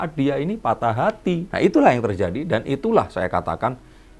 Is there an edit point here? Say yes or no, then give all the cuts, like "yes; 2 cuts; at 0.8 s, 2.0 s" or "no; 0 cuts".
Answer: no; 0 cuts